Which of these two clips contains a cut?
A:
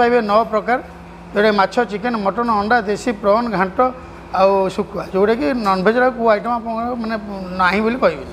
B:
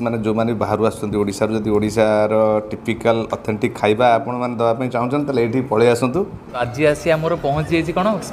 B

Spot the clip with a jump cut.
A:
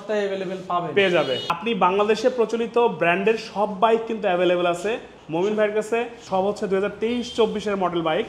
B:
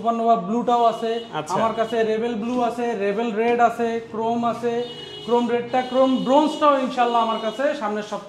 A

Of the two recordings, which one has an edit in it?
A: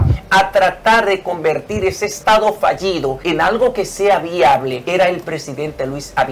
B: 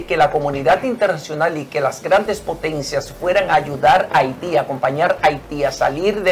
A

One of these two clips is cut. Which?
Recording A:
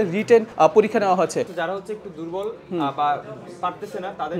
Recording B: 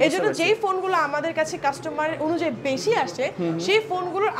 A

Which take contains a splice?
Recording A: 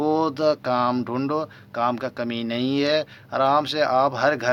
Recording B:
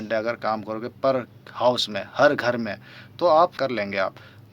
B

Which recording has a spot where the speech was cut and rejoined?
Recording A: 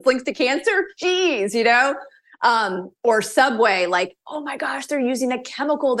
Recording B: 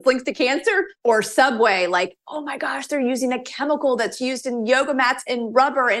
B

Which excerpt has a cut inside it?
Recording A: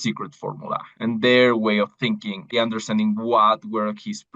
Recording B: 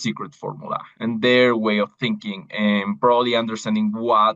A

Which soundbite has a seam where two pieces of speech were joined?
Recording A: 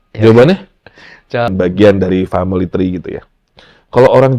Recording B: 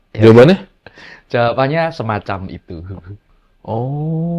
A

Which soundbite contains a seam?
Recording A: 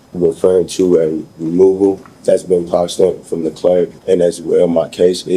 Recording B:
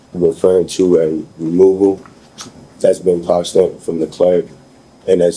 A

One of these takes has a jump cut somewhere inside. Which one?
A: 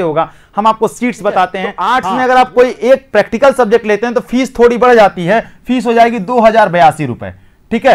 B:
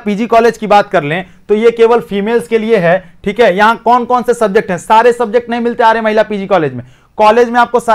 A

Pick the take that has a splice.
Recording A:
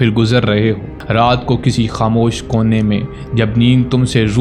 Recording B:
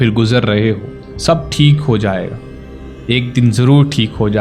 B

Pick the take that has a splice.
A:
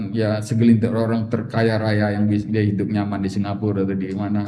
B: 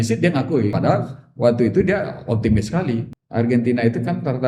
B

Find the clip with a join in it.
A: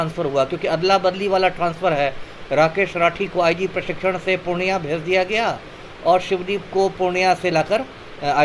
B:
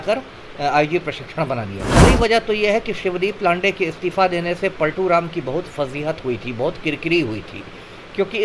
B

